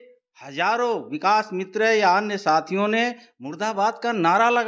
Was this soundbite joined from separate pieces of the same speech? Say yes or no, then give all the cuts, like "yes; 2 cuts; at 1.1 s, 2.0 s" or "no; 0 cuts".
no; 0 cuts